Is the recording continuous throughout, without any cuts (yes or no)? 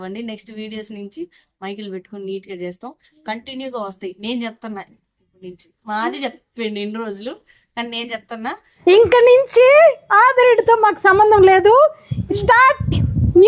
no